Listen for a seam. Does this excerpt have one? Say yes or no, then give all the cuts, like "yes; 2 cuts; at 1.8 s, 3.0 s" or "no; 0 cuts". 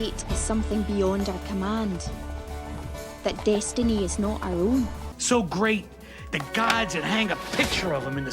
yes; 1 cut; at 5.0 s